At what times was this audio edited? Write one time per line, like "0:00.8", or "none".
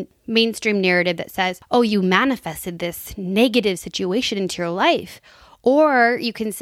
0:01.6